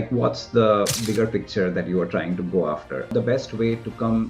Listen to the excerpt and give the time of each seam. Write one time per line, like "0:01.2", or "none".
0:03.1